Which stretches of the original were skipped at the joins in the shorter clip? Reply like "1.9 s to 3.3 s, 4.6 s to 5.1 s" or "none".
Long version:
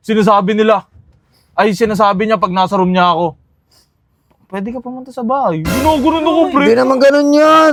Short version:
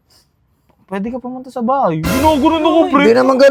none